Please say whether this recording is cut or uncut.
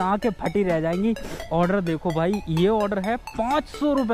cut